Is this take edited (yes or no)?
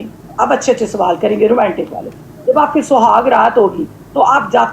no